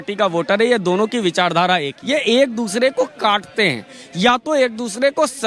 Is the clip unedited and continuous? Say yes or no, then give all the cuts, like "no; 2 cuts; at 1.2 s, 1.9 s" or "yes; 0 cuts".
no; 1 cut; at 1.9 s